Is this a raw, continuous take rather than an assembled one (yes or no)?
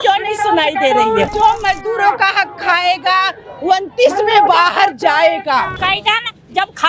no